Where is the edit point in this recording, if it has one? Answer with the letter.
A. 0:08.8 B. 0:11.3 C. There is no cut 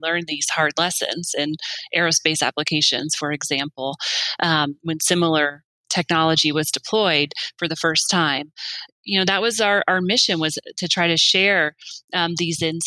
A